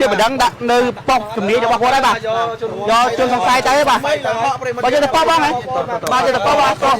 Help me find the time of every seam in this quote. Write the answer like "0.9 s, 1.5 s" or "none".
1.4 s